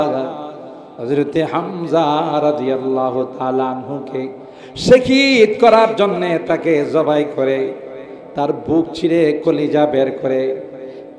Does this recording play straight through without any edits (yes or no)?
yes